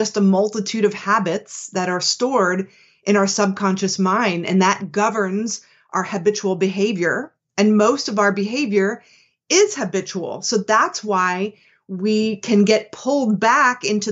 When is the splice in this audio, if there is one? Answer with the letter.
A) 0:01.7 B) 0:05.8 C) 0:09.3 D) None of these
D